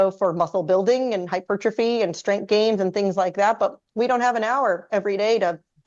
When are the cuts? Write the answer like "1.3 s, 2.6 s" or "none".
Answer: none